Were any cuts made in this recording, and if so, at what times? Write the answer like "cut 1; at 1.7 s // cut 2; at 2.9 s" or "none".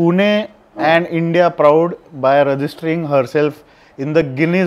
none

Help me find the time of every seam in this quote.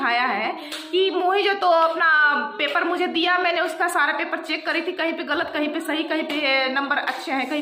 none

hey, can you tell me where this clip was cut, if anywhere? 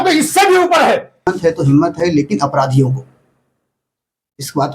cut 1; at 1.3 s

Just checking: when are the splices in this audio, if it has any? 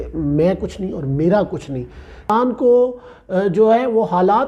cut 1; at 2.3 s

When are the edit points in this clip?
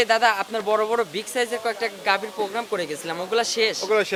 none

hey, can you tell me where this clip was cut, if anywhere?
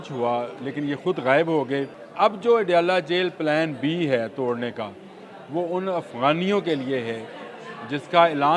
cut 1; at 2.0 s

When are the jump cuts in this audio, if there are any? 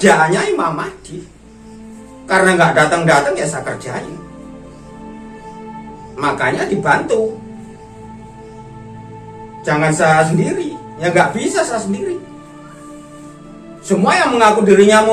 none

